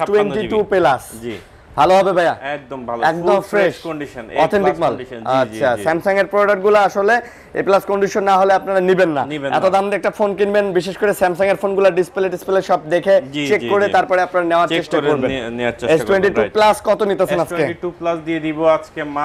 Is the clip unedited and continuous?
yes; 0 cuts

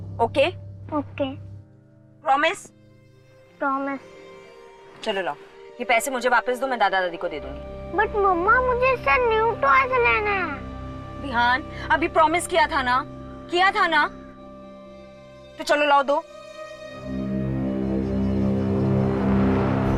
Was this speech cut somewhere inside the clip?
no; 0 cuts

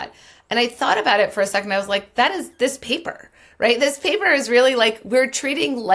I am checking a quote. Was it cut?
no; 0 cuts

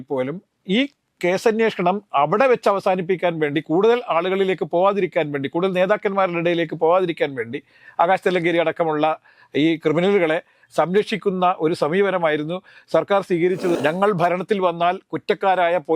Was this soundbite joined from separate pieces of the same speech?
yes; 1 cut; at 13.7 s

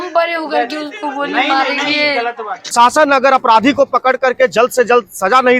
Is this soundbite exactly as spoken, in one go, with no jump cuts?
no; 1 cut; at 2.6 s

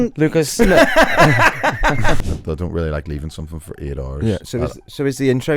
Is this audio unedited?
no; 1 cut; at 2.2 s

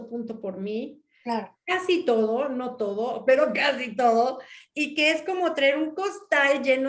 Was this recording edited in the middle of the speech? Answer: no; 0 cuts

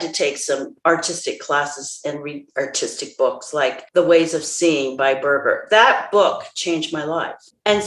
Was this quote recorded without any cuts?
yes; 0 cuts

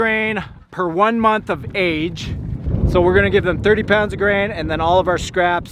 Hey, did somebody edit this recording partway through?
yes; 1 cut; at 2.7 s

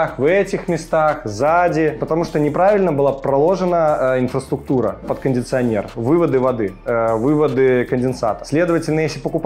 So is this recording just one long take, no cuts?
yes; 0 cuts

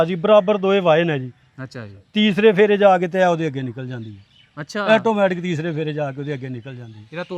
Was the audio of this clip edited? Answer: no; 0 cuts

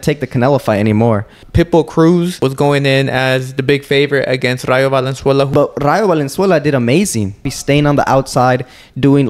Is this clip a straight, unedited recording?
no; 4 cuts; at 1.4 s, 2.4 s, 5.5 s, 7.5 s

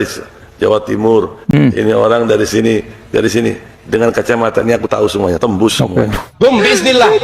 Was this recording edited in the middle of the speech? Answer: yes; 1 cut; at 6.2 s

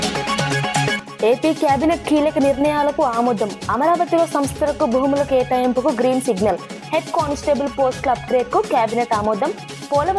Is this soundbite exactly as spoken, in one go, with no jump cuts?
no; 1 cut; at 1.0 s

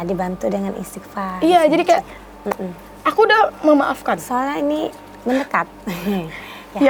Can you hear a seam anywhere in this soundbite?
no; 0 cuts

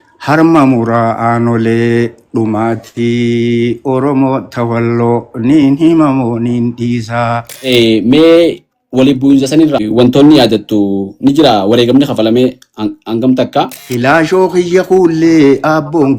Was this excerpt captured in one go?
no; 3 cuts; at 7.5 s, 9.9 s, 13.8 s

